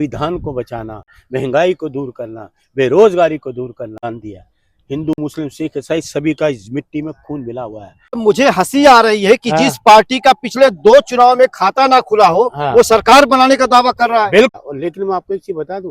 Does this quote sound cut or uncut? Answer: cut